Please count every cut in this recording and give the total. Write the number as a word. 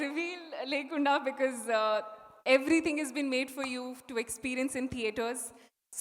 zero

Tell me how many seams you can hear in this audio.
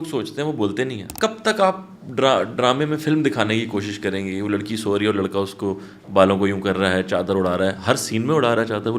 one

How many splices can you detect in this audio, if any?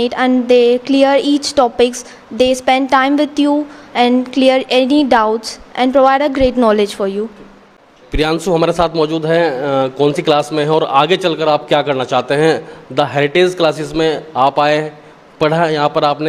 zero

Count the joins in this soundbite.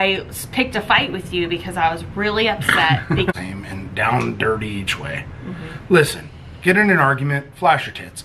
one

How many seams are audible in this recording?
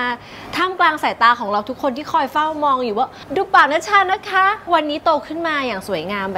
two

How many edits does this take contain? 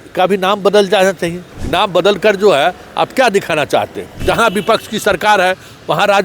two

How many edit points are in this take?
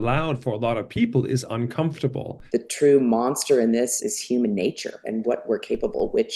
three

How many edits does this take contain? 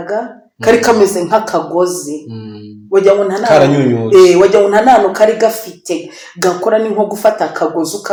zero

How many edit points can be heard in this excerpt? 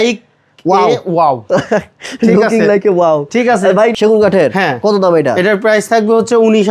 one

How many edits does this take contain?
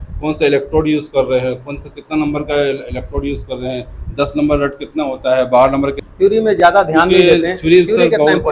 one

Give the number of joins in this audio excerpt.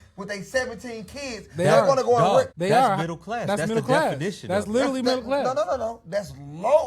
one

